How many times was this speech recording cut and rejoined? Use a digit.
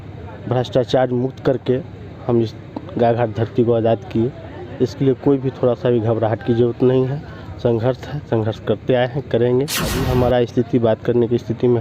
1